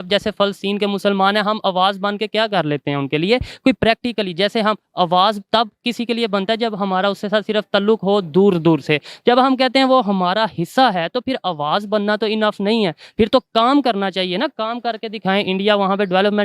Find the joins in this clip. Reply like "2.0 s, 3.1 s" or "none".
none